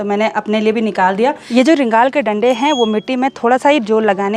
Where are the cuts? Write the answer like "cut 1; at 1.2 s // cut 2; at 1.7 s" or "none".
cut 1; at 1.4 s